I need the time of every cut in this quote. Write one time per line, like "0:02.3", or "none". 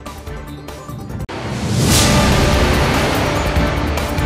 none